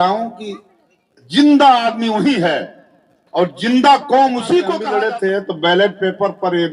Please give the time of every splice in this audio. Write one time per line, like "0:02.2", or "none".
0:04.8